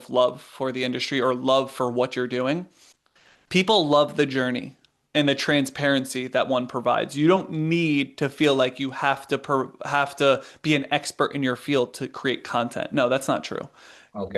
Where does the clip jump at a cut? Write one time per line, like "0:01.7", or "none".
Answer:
0:02.8